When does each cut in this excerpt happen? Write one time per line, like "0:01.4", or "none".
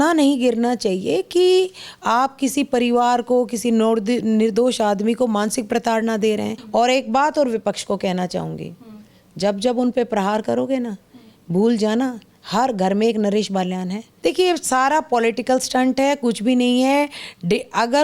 0:06.6
0:14.0